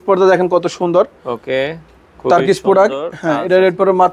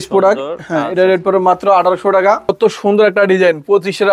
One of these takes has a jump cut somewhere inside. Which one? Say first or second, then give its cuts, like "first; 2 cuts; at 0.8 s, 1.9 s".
second; 1 cut; at 2.5 s